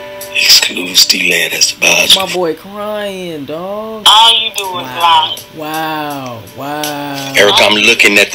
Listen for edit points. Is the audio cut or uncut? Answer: cut